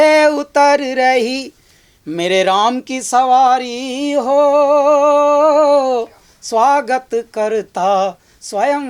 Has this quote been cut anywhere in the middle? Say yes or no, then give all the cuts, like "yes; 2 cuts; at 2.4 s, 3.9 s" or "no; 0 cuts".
no; 0 cuts